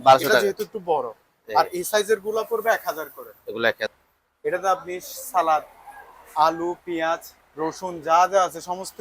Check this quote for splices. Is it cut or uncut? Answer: cut